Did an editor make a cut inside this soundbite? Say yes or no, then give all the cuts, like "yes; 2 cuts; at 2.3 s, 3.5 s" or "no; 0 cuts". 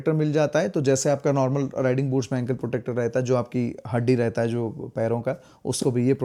no; 0 cuts